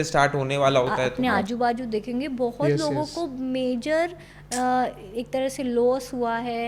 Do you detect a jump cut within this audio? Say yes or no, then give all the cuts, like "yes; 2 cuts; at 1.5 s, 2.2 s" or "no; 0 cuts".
yes; 1 cut; at 1.1 s